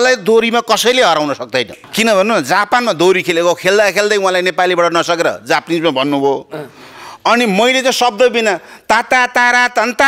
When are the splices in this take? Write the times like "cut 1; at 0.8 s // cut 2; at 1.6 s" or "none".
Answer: cut 1; at 1.8 s